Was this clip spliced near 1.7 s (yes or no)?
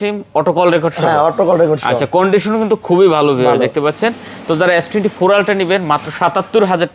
no